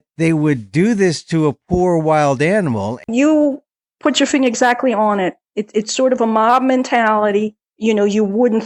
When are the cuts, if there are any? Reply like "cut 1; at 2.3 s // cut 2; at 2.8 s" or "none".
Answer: cut 1; at 3.1 s // cut 2; at 7.6 s